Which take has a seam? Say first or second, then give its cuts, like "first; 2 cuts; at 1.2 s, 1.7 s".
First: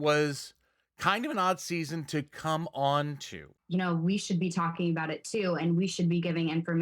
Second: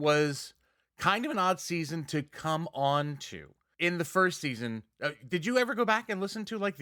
first; 1 cut; at 3.5 s